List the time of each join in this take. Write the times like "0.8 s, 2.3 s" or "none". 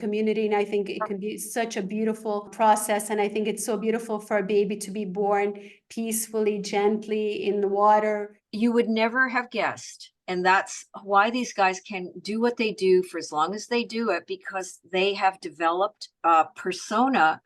8.4 s, 16.1 s